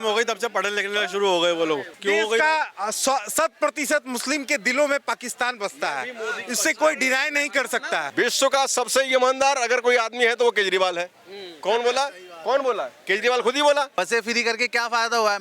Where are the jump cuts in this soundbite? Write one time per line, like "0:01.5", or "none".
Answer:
0:01.9
0:08.1
0:14.0